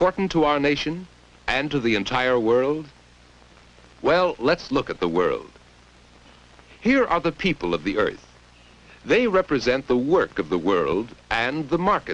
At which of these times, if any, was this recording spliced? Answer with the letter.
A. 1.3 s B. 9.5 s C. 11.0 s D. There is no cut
B